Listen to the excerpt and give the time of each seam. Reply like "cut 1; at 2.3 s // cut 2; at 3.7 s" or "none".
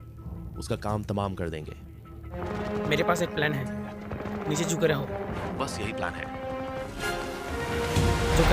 cut 1; at 2.4 s // cut 2; at 6.8 s